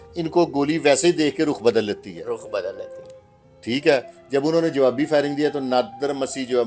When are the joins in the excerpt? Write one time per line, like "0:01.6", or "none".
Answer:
none

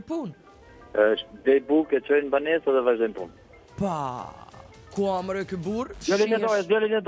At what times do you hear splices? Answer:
0:05.9

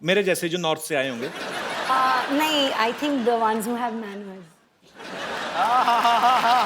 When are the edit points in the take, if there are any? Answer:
none

